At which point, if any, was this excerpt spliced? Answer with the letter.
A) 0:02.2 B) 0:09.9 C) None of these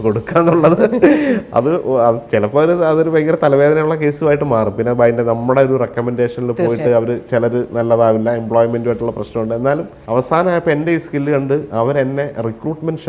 B